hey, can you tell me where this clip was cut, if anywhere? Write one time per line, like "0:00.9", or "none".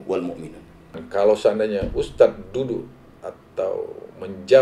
0:01.0